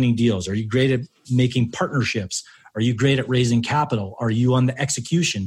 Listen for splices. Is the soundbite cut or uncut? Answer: cut